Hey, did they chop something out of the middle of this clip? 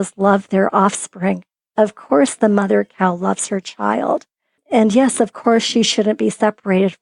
yes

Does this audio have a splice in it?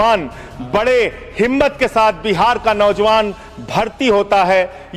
no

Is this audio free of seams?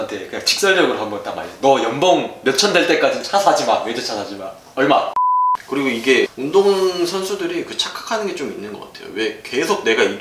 no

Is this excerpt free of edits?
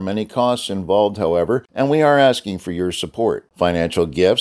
no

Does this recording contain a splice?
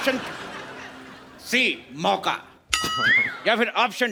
no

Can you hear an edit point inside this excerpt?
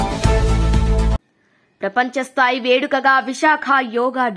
yes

